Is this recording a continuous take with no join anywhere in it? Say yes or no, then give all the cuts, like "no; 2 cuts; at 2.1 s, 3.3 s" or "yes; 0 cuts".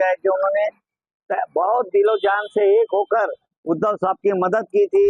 yes; 0 cuts